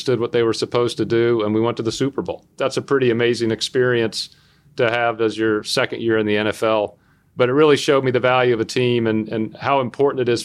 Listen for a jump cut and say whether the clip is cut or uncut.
cut